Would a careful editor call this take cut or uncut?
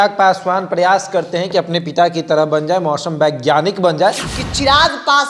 cut